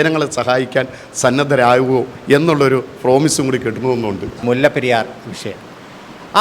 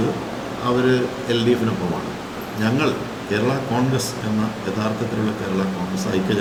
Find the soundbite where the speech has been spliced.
first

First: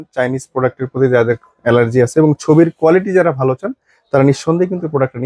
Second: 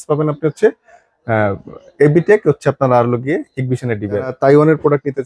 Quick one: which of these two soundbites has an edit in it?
second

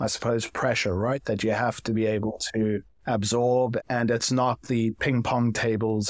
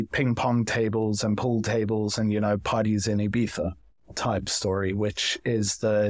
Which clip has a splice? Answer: first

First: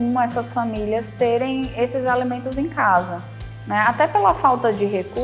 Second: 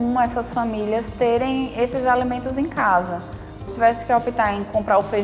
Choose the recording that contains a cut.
second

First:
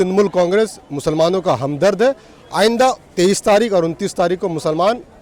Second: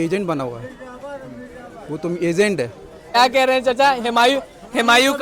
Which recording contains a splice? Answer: second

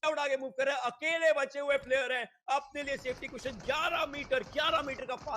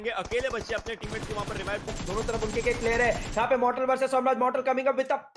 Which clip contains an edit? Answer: second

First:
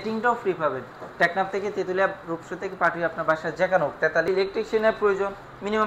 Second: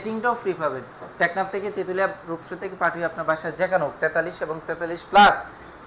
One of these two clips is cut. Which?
first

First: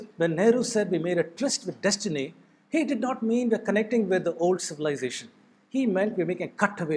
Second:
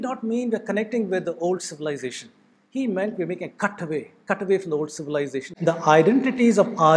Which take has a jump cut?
second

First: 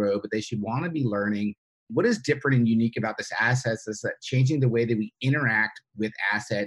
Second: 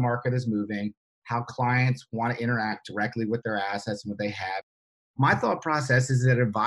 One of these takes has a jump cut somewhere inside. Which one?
second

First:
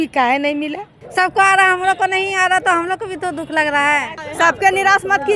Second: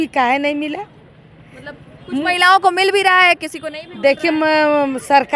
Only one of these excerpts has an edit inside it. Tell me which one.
first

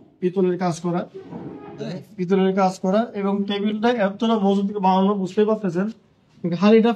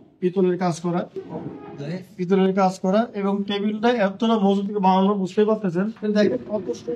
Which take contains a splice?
second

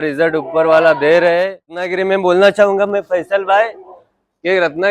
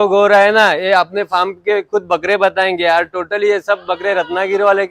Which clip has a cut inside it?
first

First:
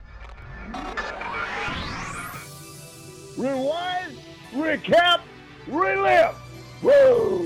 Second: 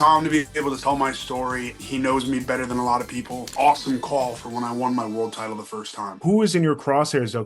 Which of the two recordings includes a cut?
second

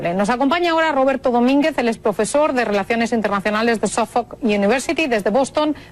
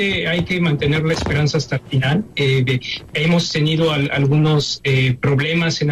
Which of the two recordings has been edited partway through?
first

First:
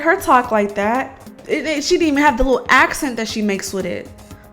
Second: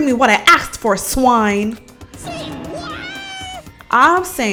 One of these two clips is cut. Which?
first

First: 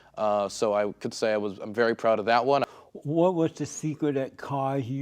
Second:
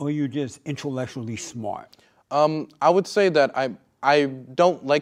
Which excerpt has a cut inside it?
first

